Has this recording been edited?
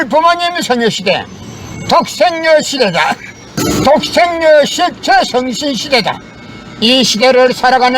yes; 1 cut; at 3.6 s

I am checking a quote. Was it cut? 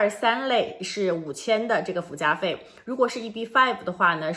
no; 0 cuts

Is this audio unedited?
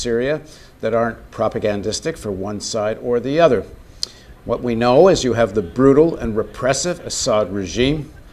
no; 1 cut; at 7.1 s

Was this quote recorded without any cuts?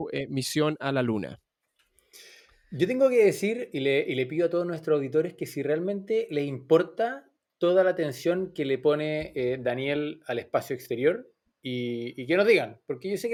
yes; 0 cuts

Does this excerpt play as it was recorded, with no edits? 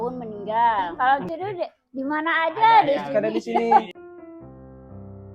no; 1 cut; at 0.9 s

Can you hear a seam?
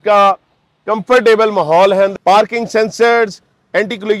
yes; 1 cut; at 2.1 s

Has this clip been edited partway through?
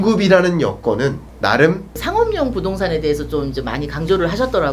yes; 2 cuts; at 1.3 s, 1.9 s

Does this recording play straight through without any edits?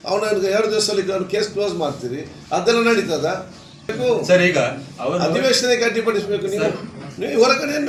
yes; 0 cuts

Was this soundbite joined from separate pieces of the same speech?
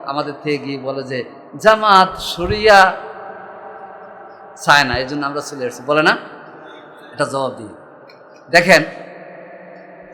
no; 0 cuts

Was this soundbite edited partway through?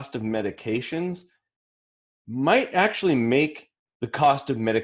no; 0 cuts

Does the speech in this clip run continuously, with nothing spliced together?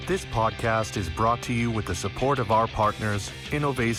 yes; 0 cuts

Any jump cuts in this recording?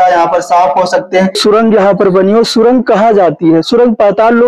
yes; 1 cut; at 1.4 s

